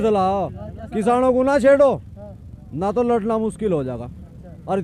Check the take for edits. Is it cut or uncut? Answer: uncut